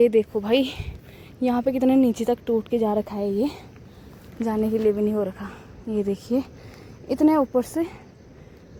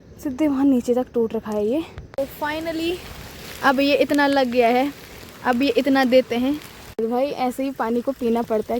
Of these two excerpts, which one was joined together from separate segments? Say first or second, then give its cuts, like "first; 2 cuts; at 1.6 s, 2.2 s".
second; 2 cuts; at 2.0 s, 6.8 s